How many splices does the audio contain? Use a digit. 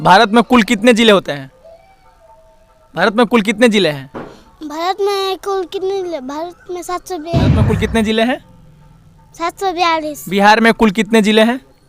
1